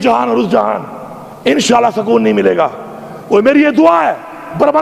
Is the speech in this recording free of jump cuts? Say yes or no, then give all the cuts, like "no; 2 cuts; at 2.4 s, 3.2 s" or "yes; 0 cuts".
yes; 0 cuts